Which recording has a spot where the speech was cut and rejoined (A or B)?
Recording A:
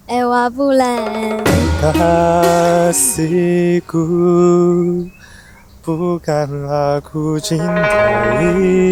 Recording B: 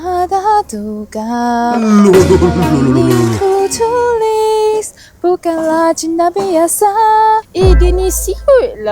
B